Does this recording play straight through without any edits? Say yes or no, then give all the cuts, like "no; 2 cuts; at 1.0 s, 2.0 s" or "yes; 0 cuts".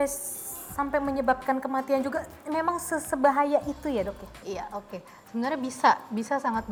yes; 0 cuts